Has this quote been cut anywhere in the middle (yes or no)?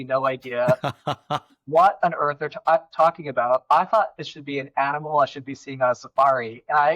no